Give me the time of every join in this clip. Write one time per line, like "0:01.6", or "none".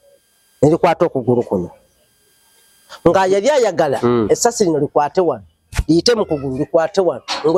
none